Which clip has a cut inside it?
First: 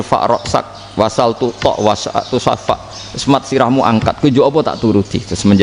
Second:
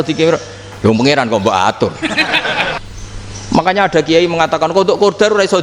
second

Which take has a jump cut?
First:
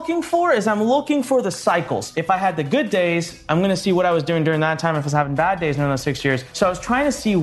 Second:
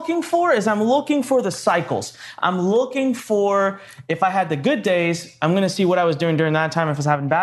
first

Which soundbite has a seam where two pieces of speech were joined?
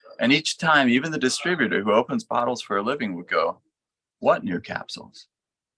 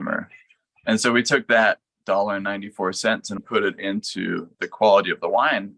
second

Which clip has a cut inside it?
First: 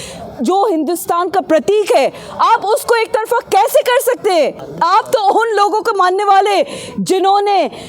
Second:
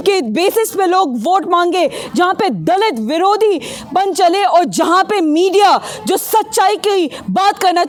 first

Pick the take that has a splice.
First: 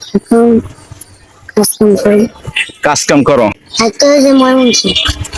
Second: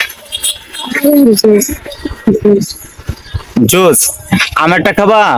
first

